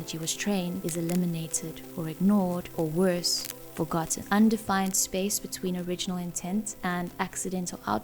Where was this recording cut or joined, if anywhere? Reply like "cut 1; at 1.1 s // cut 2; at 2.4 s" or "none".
cut 1; at 0.8 s // cut 2; at 2.7 s // cut 3; at 4.2 s